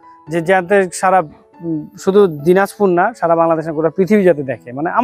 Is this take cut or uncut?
uncut